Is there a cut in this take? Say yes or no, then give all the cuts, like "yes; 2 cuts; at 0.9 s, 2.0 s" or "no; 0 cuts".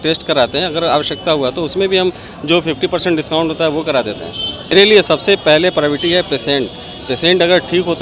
yes; 1 cut; at 4.7 s